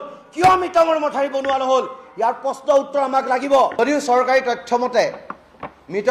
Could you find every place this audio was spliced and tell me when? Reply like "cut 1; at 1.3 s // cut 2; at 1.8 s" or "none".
cut 1; at 3.7 s